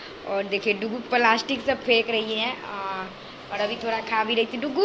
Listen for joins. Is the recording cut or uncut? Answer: uncut